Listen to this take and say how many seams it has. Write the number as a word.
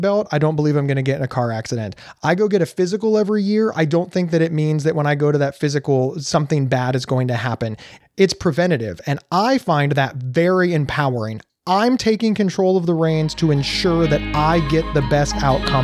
one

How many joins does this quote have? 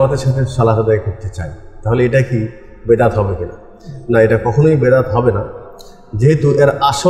zero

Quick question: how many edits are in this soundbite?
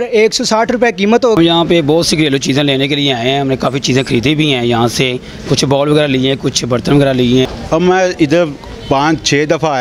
two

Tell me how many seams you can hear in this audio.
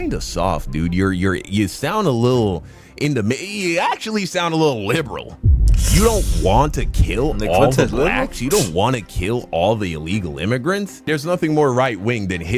one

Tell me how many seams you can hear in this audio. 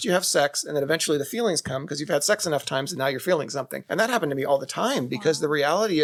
zero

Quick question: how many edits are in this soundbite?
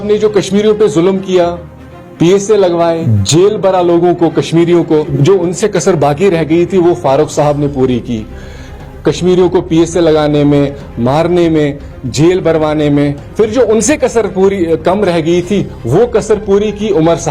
two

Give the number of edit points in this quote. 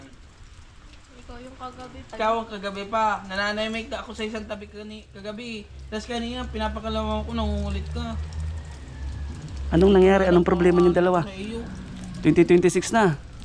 one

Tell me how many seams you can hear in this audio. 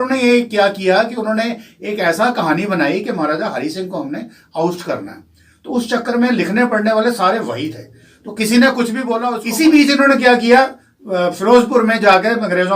one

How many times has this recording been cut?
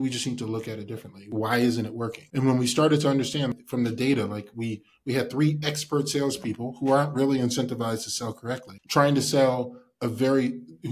four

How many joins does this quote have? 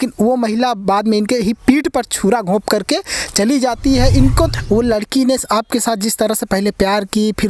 one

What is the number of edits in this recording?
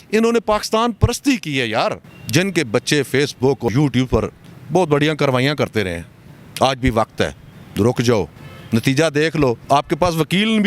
three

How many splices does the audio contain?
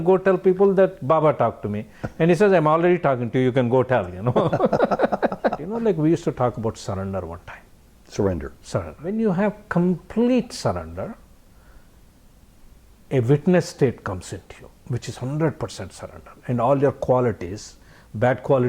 two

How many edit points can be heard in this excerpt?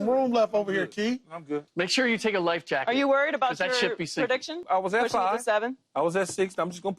two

